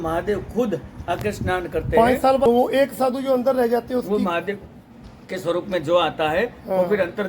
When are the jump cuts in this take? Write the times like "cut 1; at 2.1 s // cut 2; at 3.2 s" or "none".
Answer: cut 1; at 2.4 s